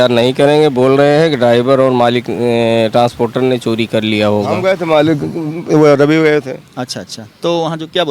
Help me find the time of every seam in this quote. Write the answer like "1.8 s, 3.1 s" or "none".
4.5 s